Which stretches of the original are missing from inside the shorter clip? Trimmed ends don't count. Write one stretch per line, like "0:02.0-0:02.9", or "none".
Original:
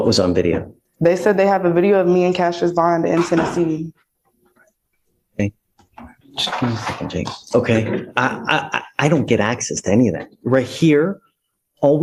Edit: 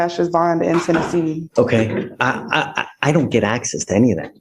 0:03.9-0:07.4